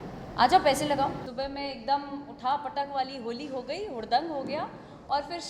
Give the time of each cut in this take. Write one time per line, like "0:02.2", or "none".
0:01.2